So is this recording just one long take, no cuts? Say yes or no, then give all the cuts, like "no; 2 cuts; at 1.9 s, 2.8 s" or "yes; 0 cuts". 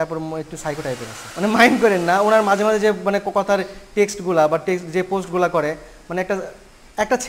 no; 1 cut; at 1.2 s